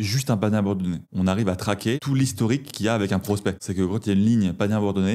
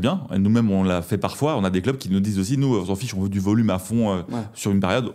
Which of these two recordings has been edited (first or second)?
first